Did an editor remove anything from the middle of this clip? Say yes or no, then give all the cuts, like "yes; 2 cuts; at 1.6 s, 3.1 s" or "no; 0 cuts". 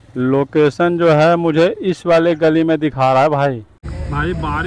yes; 1 cut; at 3.7 s